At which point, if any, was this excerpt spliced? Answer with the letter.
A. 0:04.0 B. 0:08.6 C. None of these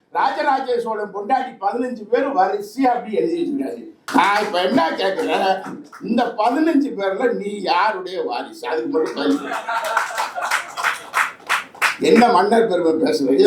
A